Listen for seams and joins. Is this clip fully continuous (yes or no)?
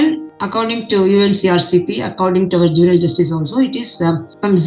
yes